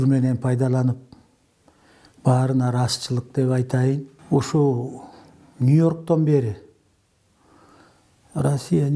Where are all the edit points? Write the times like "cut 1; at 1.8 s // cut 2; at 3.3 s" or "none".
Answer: cut 1; at 4.1 s